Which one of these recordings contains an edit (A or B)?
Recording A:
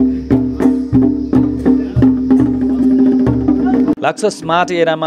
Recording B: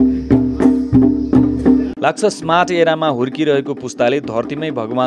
B